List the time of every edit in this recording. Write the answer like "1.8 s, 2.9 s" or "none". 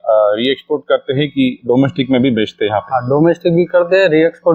none